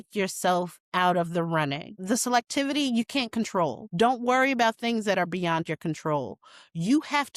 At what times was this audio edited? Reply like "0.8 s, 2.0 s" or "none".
2.0 s, 3.8 s